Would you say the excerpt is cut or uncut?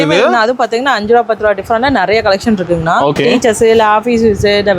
cut